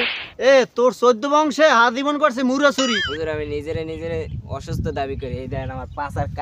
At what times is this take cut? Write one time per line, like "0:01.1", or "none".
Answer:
0:03.1